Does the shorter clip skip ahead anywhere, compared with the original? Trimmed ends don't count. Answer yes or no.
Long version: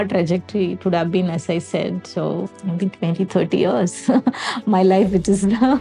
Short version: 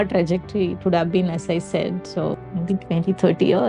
yes